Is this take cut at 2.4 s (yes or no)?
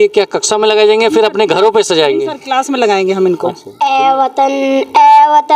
no